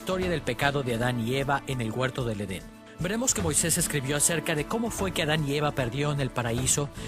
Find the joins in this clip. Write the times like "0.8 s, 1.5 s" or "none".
4.7 s